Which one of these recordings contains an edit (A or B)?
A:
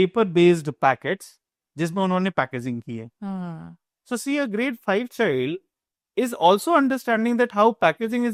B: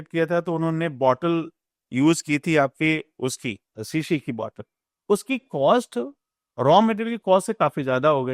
B